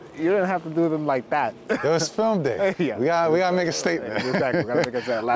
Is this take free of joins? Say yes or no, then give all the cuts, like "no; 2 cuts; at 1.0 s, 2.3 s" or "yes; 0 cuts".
yes; 0 cuts